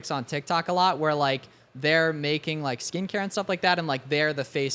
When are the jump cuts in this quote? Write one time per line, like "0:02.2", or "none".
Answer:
none